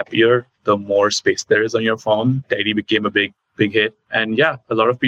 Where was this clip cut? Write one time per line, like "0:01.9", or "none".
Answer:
none